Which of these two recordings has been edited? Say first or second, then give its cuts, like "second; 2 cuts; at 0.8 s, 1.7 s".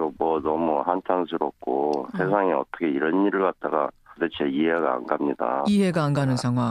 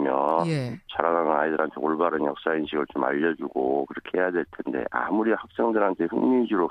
first; 1 cut; at 4.2 s